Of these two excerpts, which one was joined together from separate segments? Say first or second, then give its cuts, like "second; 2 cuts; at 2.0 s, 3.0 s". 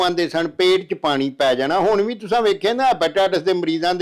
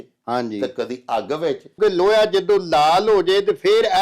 second; 1 cut; at 1.8 s